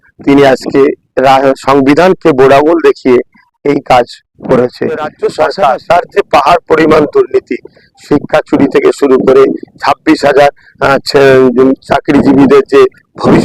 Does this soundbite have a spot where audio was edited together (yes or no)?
yes